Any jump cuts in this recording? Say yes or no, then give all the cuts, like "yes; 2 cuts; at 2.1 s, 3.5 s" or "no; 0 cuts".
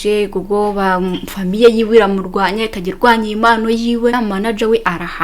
yes; 1 cut; at 4.1 s